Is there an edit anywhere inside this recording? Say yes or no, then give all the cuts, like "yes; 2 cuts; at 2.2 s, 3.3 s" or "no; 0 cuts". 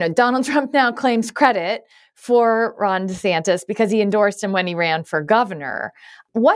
no; 0 cuts